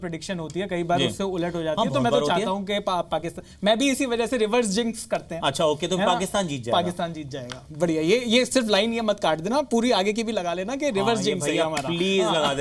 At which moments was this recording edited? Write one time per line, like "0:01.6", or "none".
none